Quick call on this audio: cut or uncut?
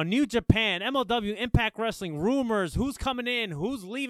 uncut